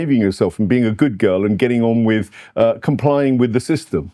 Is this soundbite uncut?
yes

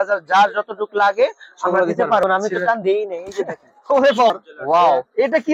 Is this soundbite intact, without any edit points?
no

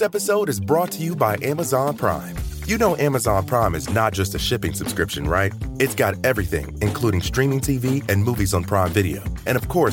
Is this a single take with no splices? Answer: yes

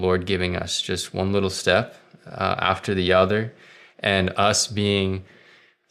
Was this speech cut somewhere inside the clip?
no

